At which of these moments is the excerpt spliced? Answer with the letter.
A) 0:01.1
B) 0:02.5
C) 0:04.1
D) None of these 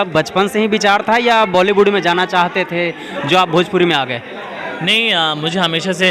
D